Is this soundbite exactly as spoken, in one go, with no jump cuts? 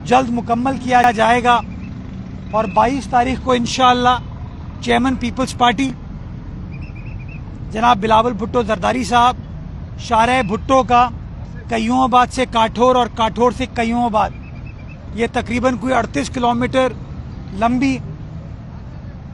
yes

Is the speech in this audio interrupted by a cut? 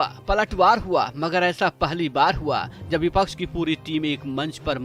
no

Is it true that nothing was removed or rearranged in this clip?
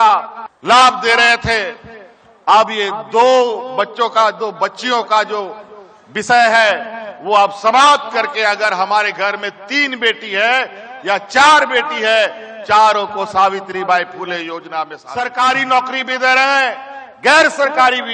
no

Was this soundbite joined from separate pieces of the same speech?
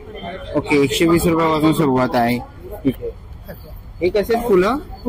yes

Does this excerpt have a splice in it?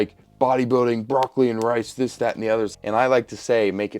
yes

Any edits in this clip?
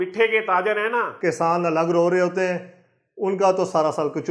yes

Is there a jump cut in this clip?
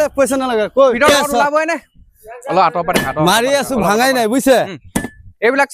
yes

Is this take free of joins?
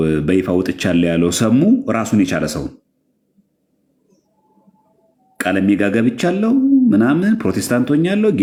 yes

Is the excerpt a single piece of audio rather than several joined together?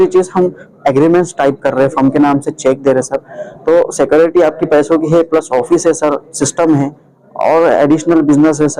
yes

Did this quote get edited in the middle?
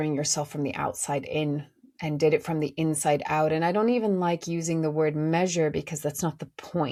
no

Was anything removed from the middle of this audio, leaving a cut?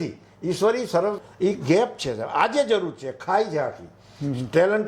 yes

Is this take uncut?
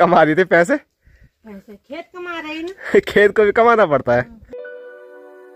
no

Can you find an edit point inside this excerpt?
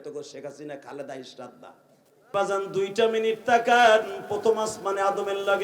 yes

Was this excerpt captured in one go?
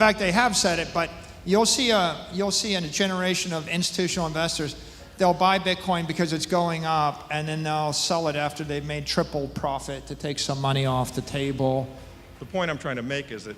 no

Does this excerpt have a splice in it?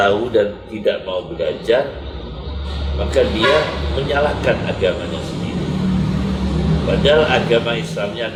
no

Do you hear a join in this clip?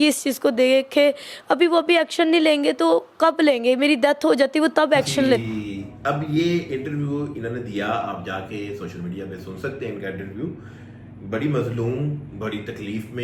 no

